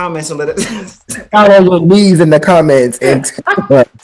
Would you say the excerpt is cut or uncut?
cut